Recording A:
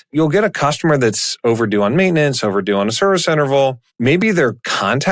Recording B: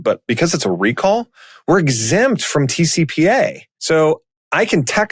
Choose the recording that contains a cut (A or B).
B